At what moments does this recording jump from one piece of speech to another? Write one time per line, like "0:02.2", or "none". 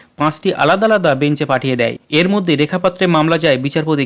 0:02.0